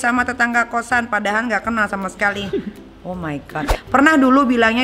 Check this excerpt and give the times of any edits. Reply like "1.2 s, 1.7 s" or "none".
3.7 s